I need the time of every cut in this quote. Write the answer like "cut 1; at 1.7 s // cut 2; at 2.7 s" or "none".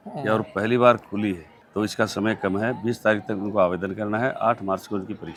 none